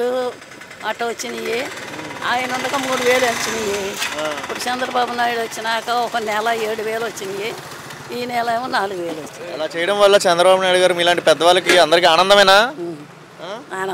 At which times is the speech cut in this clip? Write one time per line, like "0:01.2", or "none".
none